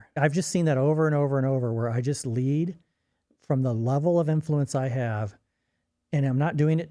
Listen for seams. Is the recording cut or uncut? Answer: uncut